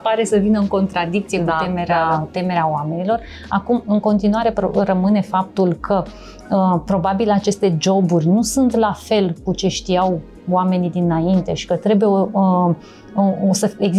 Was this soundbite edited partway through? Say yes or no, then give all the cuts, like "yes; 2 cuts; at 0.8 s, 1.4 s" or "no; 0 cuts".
no; 0 cuts